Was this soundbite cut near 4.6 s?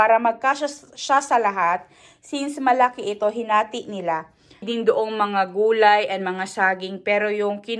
yes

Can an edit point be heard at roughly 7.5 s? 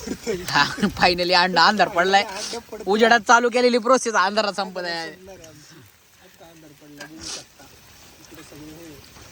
no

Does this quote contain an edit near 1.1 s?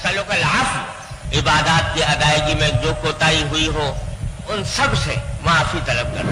yes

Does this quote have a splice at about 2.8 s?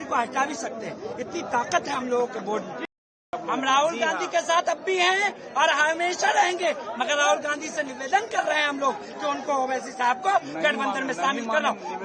yes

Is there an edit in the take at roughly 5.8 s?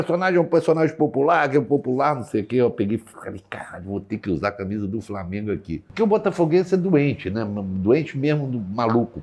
yes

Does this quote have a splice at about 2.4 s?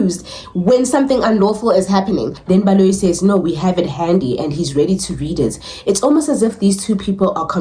yes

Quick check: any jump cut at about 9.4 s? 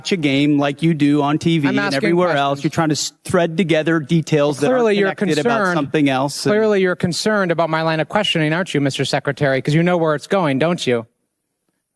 no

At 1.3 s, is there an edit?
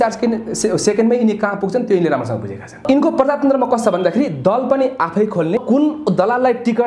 no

